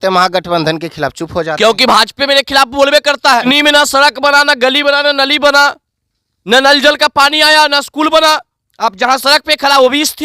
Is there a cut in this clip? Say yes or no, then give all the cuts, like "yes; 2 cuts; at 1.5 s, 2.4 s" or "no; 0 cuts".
yes; 1 cut; at 3.4 s